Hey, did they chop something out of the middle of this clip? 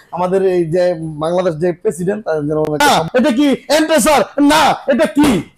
yes; 1 cut; at 2.8 s

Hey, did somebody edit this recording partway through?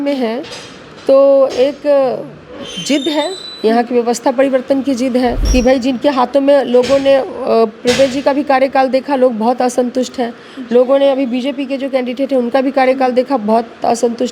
yes; 1 cut; at 5.4 s

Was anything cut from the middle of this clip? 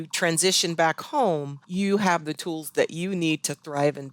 yes; 1 cut; at 1.6 s

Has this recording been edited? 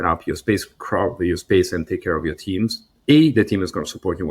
no; 0 cuts

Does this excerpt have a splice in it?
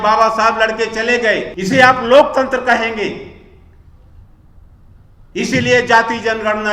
yes; 1 cut; at 1.5 s

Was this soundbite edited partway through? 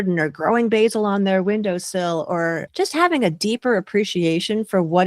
yes; 1 cut; at 2.7 s

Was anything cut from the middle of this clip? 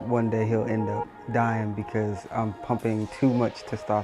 no; 0 cuts

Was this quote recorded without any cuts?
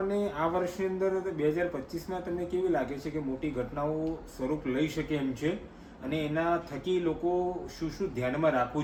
yes; 0 cuts

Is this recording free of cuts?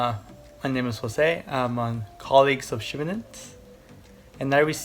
yes; 0 cuts

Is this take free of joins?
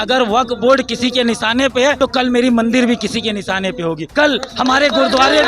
no; 2 cuts; at 2.0 s, 4.0 s

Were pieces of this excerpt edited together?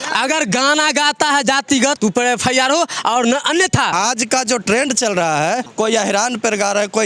yes; 3 cuts; at 2.0 s, 3.9 s, 5.7 s

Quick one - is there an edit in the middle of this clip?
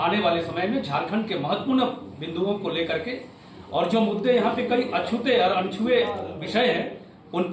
no; 0 cuts

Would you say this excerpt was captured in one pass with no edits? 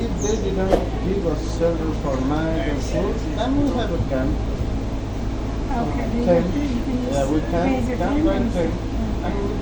yes; 0 cuts

